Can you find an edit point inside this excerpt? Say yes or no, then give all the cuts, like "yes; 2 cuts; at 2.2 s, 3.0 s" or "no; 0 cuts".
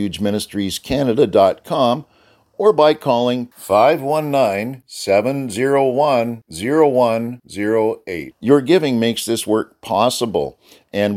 no; 0 cuts